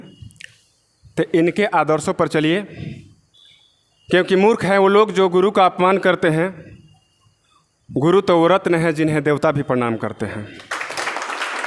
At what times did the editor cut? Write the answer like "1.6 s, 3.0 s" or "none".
none